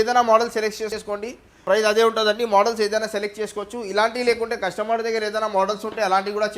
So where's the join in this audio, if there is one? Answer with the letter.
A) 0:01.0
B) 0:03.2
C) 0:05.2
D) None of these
A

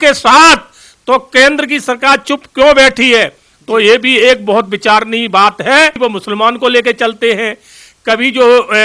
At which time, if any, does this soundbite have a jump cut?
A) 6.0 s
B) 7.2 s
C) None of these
A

